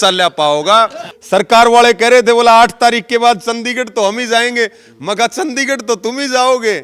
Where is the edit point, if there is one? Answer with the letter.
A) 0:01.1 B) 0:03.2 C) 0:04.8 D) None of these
A